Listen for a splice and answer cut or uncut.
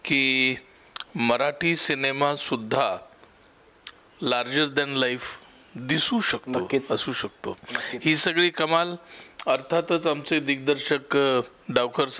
uncut